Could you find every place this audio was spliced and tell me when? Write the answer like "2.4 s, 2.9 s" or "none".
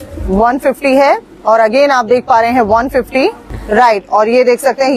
3.5 s

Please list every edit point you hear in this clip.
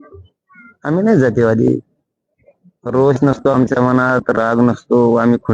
none

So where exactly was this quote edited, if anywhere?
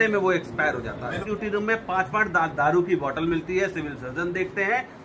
1.2 s

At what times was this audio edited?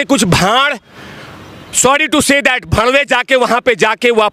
none

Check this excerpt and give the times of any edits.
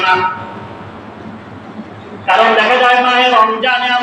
none

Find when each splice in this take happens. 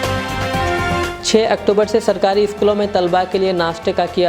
1.1 s

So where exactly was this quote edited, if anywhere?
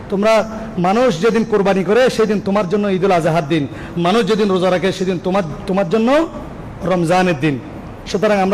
none

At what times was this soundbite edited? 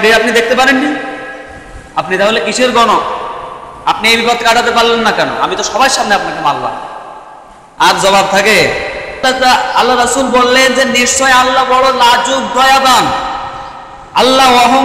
9.2 s

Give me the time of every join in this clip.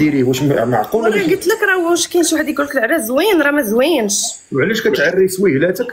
none

